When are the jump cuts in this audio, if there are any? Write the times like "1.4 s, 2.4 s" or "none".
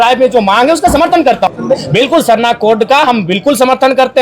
1.5 s